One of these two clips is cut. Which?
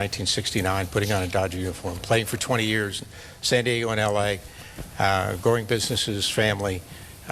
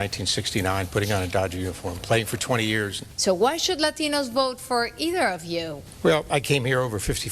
second; 2 cuts; at 3.0 s, 5.8 s

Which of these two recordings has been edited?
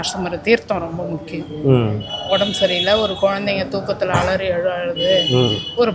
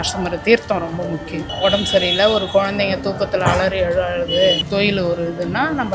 second; 2 cuts; at 1.4 s, 4.6 s

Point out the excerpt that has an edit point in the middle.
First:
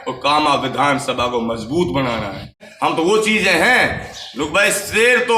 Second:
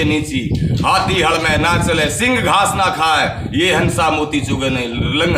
first; 1 cut; at 2.6 s

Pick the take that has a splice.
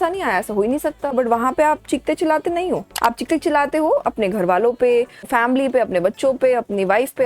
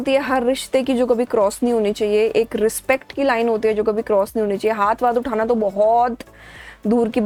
first; 3 cuts; at 1.1 s, 2.9 s, 5.3 s

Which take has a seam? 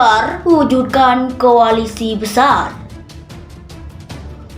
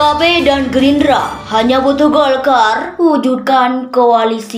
first; 1 cut; at 2.7 s

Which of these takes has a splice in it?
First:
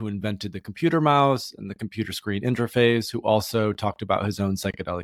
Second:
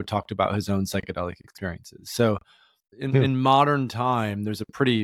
second; 1 cut; at 2.9 s

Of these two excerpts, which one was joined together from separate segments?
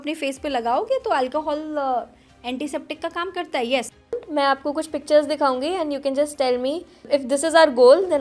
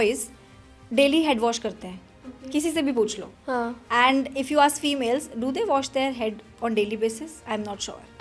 first; 2 cuts; at 4.1 s, 6.9 s

